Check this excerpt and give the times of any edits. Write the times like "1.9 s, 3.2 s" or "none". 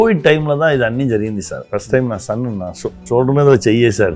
1.6 s, 3.0 s